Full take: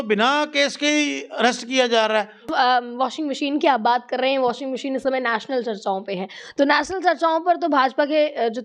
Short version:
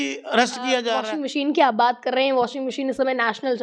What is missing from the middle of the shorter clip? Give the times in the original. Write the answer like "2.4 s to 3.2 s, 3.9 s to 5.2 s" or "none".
2.1 s to 3.1 s